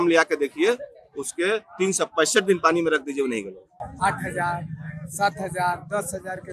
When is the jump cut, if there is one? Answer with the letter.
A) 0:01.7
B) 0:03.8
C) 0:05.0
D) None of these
B